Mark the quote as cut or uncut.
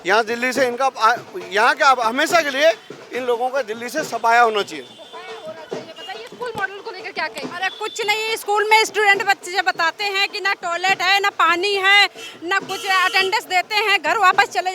uncut